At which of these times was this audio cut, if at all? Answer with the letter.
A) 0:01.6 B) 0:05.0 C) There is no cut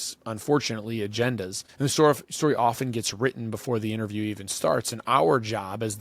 A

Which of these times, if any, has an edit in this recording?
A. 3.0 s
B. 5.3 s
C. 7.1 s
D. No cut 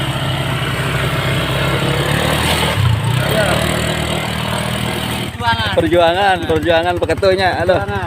B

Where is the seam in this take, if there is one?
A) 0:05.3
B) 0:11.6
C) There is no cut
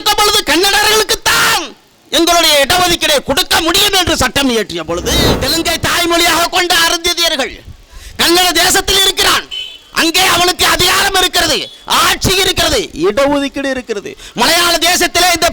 A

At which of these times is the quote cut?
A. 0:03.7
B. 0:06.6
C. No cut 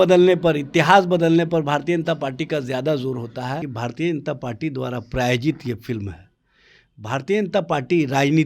A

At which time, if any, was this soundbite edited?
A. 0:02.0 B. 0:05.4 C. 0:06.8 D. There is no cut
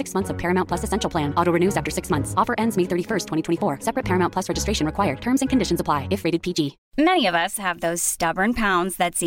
C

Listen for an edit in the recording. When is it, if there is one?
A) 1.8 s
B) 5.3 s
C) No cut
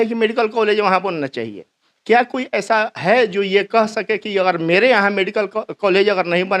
C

